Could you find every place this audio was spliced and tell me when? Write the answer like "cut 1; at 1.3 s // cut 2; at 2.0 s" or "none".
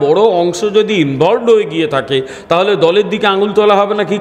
none